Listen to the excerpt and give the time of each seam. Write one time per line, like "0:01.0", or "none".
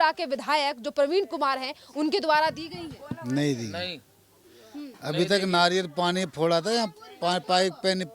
none